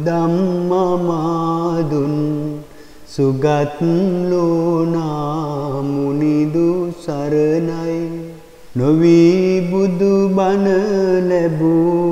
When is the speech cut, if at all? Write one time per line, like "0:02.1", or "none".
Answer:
none